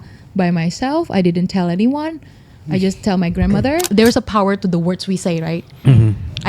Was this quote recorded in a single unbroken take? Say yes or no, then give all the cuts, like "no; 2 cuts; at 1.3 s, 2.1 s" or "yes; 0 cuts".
no; 1 cut; at 3.9 s